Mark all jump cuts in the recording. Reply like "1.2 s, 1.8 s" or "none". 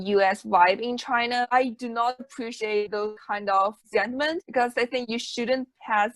1.5 s